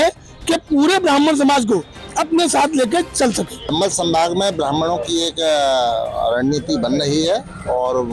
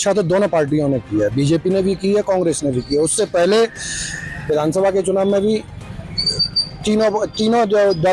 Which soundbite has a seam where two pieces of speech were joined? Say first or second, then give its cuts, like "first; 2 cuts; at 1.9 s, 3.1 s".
first; 1 cut; at 3.7 s